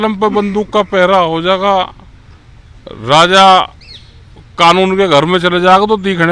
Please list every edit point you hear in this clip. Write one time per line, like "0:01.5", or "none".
none

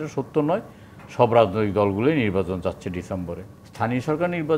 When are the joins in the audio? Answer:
0:03.4

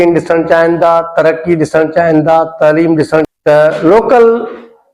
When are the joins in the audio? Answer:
0:03.3

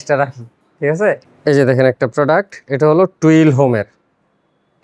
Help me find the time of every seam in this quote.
0:01.3

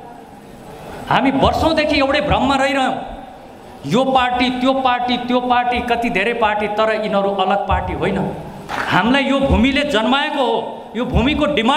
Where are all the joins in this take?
0:08.7

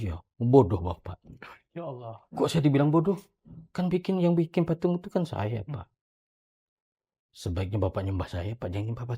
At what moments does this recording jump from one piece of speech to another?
none

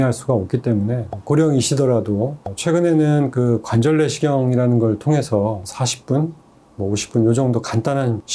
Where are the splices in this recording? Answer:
0:02.5

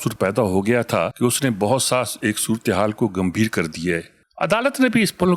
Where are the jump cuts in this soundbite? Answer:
0:01.1
0:04.2

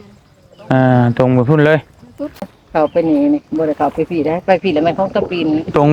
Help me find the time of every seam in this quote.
0:02.6

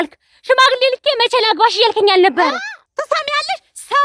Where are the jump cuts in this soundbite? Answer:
0:02.8

